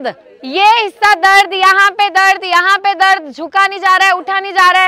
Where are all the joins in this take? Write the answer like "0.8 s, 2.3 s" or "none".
none